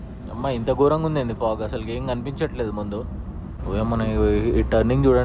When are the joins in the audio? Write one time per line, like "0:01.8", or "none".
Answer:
0:03.6